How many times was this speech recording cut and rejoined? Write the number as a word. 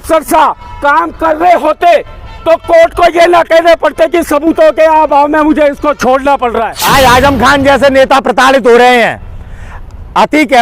one